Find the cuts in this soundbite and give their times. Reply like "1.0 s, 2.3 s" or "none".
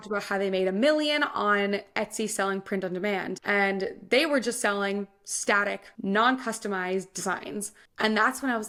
none